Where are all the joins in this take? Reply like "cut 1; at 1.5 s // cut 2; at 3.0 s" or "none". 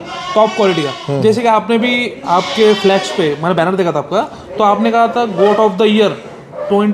none